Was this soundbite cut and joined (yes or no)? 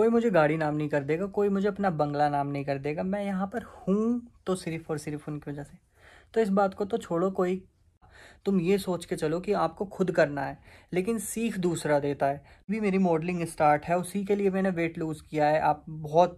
yes